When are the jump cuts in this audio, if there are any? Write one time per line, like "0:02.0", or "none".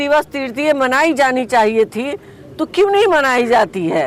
none